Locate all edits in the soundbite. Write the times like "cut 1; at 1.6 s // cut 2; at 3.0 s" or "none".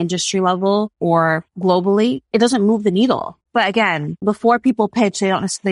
cut 1; at 1.2 s // cut 2; at 3.4 s // cut 3; at 4.2 s